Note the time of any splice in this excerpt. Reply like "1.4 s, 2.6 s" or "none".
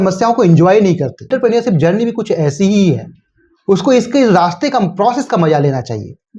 1.1 s